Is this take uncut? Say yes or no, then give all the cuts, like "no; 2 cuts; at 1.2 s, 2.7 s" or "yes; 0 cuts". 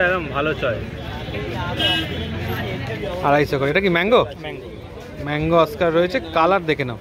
no; 1 cut; at 3.0 s